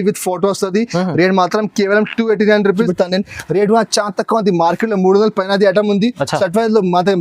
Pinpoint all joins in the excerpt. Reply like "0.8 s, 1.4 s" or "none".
2.9 s